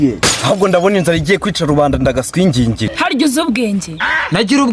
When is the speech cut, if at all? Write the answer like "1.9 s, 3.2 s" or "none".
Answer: 2.9 s